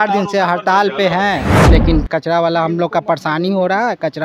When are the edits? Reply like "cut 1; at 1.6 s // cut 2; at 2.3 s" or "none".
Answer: cut 1; at 1.5 s